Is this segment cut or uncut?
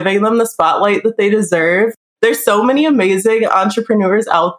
cut